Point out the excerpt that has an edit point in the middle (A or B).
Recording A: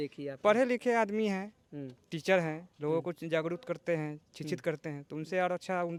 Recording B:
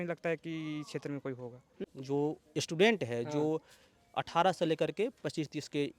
B